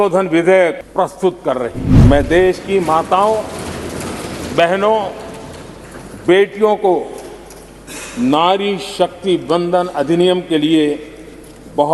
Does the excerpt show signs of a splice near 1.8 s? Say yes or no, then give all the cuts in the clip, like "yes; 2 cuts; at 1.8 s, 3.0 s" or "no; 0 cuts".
yes; 2 cuts; at 0.8 s, 1.8 s